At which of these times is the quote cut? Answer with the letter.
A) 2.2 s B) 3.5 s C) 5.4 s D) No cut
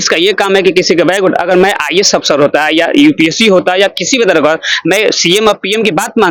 D